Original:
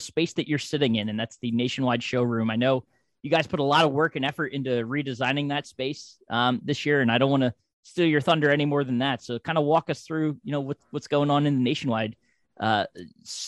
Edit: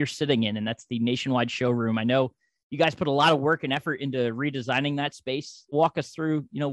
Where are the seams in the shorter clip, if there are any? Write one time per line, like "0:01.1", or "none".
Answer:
0:05.7